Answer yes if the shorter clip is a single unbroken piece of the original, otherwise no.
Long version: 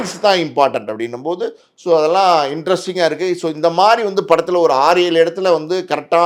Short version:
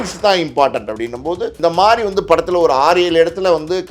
no